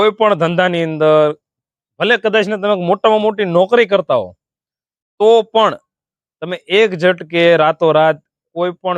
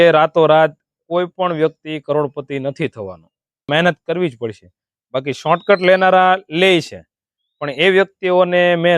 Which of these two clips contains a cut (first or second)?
second